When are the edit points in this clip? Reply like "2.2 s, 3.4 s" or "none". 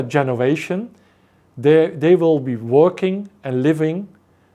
none